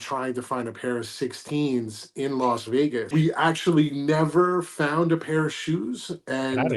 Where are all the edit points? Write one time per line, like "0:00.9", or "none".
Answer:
0:03.0